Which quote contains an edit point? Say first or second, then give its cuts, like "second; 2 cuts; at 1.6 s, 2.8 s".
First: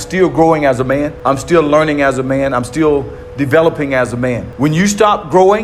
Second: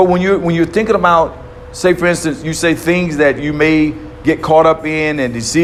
first; 2 cuts; at 1.1 s, 4.5 s